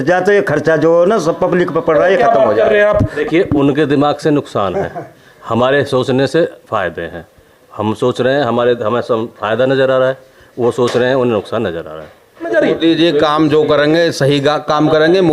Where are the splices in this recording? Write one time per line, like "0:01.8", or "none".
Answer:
0:03.2
0:12.5